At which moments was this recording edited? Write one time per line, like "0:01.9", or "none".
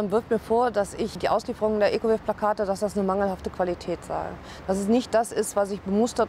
0:01.2

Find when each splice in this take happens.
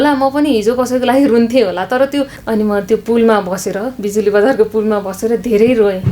0:02.4

